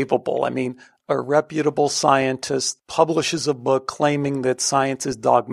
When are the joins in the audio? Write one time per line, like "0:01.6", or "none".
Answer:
0:02.7